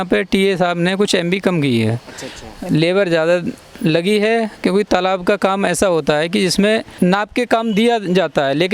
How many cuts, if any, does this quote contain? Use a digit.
1